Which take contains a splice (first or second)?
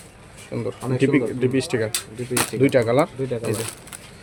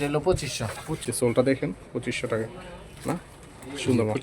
second